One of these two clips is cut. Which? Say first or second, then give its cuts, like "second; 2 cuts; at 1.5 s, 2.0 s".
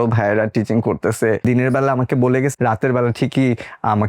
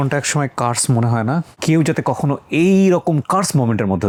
first; 2 cuts; at 1.4 s, 2.6 s